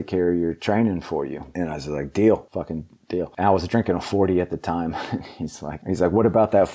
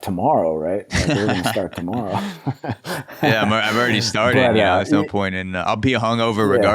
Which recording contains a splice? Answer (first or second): first